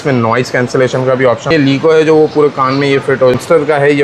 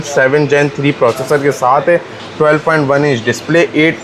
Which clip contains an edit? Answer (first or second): first